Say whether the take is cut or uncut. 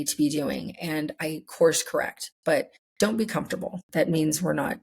cut